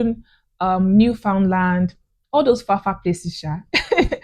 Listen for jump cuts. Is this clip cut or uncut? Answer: uncut